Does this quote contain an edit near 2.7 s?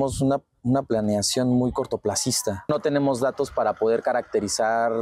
yes; 1 cut; at 2.7 s

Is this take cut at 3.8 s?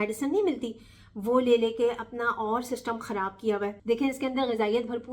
yes; 1 cut; at 3.8 s

